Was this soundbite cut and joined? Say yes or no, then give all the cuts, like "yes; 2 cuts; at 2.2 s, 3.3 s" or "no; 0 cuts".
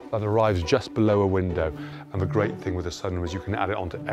yes; 1 cut; at 1.7 s